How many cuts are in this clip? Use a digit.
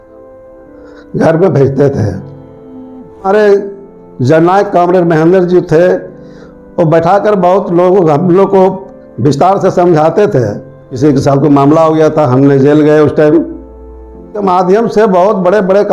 3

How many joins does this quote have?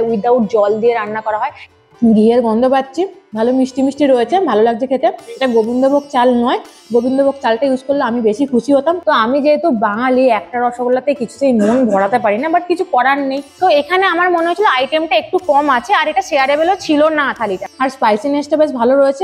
4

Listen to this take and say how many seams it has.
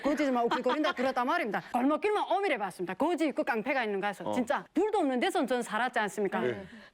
2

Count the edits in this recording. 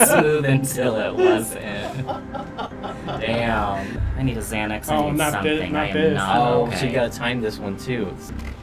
1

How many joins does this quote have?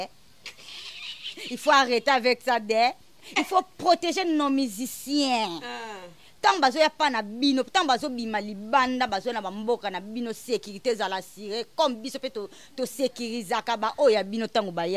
0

